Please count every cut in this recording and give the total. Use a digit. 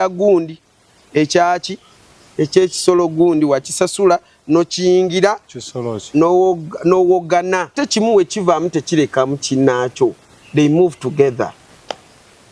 1